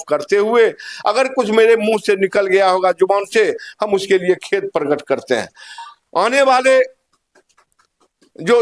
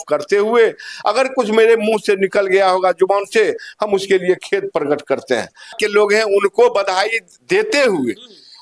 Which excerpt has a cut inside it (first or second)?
second